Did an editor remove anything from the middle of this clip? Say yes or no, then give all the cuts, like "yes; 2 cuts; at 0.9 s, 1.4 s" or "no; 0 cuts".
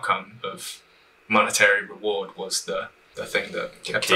yes; 1 cut; at 3.0 s